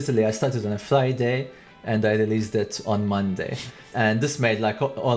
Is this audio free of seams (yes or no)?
no